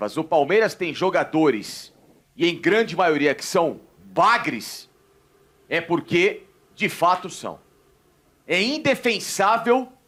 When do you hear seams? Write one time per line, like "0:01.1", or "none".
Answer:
none